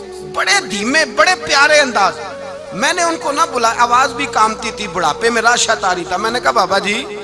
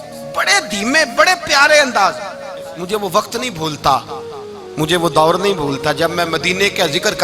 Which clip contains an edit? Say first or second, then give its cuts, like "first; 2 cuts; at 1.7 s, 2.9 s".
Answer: second; 1 cut; at 2.6 s